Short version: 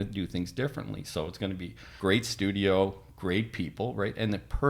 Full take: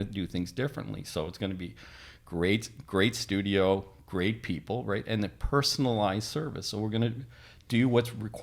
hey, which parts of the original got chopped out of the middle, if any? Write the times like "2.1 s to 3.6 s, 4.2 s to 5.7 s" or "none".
1.9 s to 2.8 s